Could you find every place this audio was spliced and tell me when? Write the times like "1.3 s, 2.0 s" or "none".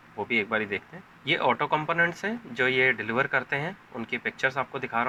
none